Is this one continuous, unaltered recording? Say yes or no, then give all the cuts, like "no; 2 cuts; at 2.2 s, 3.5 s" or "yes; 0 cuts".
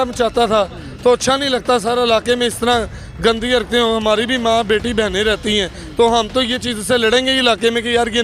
yes; 0 cuts